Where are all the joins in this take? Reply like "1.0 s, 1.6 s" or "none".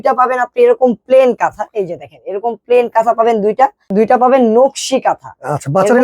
3.8 s